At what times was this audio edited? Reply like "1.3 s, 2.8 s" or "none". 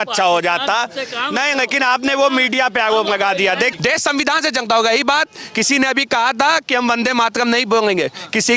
3.7 s